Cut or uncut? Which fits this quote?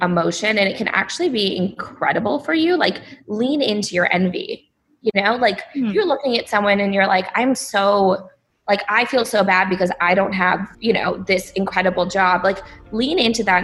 uncut